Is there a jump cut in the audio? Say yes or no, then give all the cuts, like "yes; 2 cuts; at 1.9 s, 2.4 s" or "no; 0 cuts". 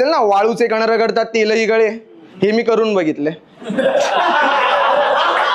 no; 0 cuts